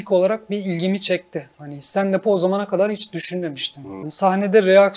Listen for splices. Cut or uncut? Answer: cut